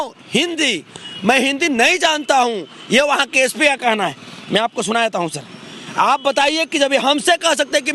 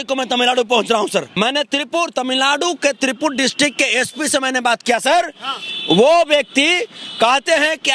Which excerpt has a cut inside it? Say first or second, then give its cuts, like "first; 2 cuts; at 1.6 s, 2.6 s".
second; 1 cut; at 1.3 s